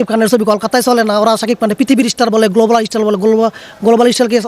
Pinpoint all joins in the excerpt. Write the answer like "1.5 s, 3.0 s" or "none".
none